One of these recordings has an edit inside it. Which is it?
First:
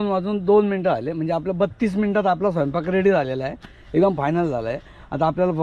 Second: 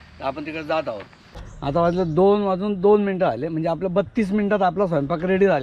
second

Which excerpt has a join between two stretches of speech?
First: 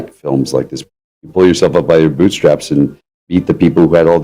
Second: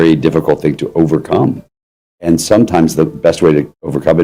first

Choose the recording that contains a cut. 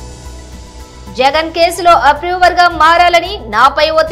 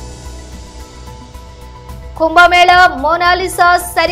second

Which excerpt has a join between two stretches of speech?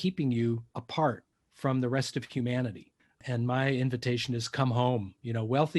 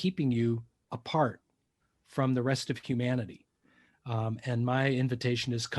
first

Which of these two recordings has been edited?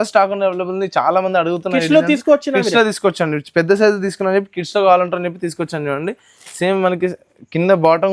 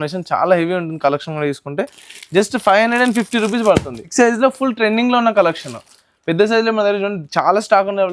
second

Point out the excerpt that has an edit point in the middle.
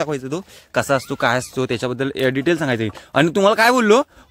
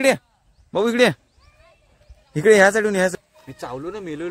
second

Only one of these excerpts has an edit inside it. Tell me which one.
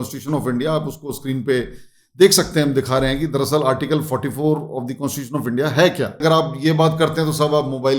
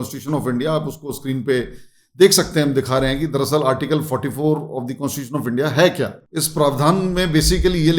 first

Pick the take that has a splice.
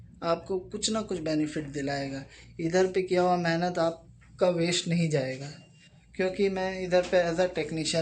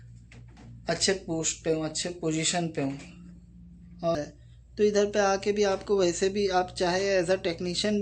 second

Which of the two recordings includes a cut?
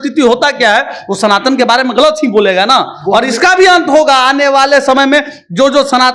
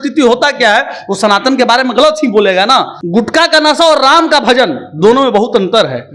second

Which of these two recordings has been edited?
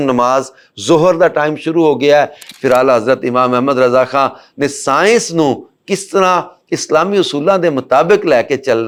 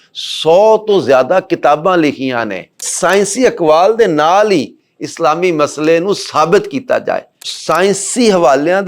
second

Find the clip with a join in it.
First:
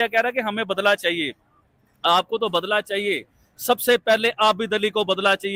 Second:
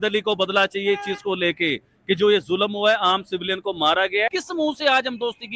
second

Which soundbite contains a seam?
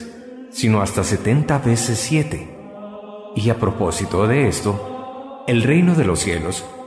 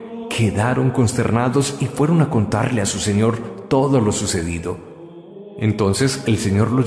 second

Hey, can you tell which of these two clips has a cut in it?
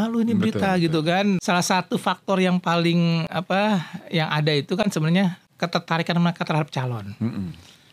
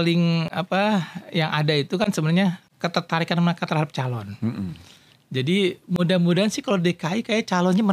first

